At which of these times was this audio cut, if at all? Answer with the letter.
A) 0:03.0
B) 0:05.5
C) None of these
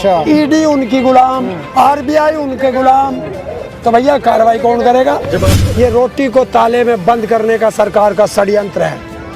B